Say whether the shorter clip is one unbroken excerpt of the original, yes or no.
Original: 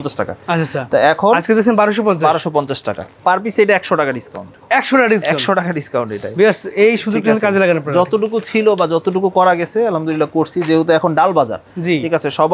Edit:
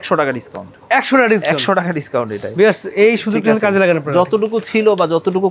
yes